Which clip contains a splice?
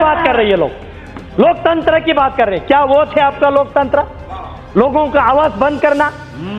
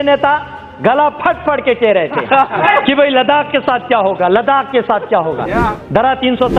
second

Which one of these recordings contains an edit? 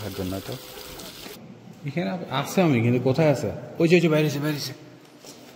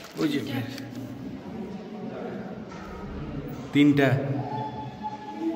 first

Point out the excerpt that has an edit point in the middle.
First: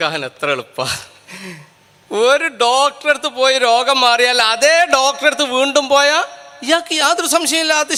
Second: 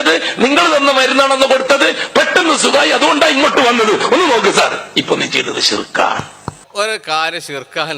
second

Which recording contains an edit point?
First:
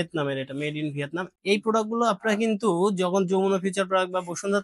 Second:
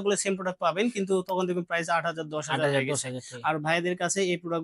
first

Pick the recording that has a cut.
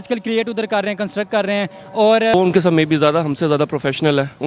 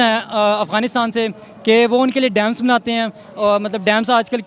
first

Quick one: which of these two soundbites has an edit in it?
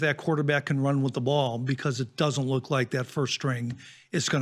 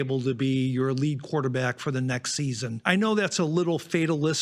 second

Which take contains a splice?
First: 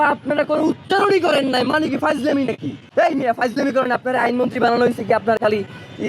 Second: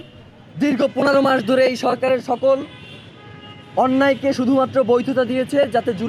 first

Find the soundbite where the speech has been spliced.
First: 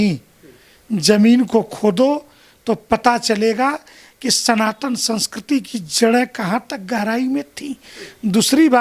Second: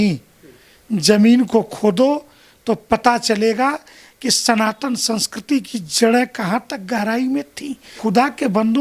second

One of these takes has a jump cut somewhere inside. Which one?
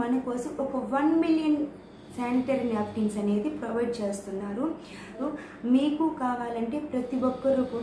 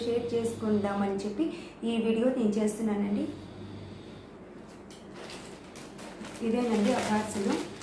first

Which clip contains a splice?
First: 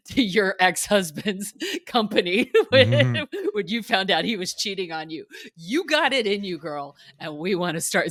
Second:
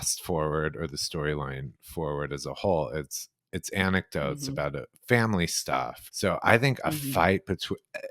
second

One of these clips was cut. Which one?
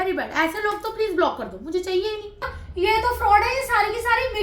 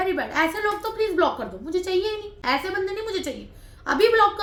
first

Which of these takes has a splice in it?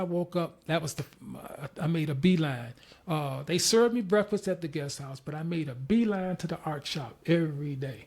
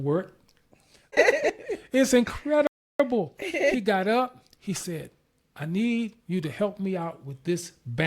second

